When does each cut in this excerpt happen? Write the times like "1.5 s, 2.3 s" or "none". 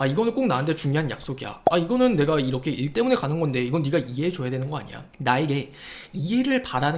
none

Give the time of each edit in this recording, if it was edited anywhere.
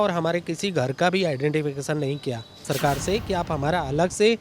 2.6 s

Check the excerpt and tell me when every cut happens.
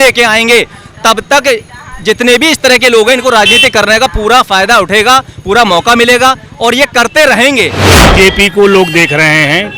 8.0 s

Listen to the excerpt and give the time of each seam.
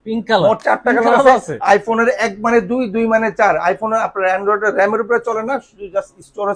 none

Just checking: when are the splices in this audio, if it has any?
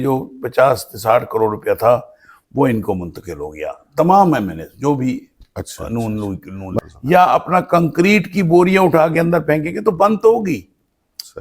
6.8 s

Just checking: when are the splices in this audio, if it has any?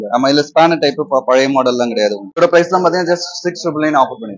none

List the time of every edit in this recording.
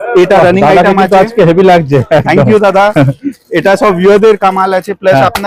none

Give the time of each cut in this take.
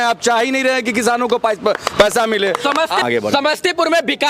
3.0 s

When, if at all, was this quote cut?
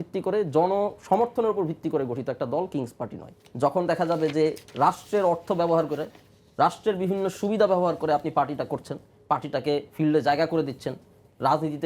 3.3 s

